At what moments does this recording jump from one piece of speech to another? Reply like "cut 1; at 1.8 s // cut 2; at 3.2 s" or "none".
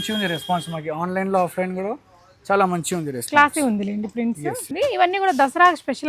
cut 1; at 4.7 s